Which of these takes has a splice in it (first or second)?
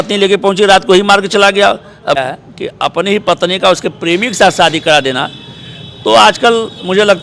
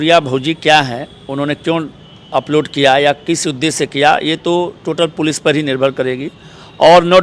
first